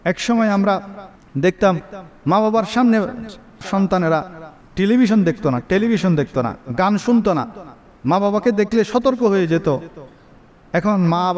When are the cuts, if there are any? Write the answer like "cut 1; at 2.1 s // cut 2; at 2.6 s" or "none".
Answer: cut 1; at 3.6 s